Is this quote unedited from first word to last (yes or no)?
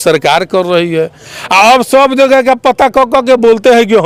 yes